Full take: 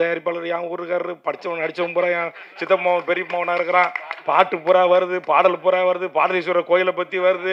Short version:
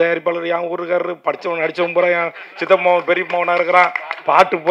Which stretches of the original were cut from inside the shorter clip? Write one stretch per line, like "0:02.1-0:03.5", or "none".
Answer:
none